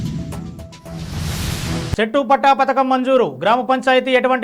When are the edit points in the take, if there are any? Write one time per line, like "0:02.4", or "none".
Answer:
0:01.9